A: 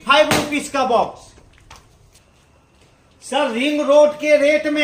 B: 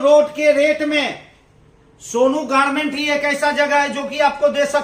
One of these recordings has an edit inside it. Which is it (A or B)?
A